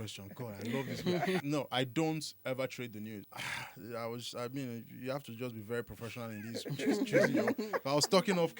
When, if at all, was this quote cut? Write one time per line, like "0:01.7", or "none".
0:01.4
0:03.2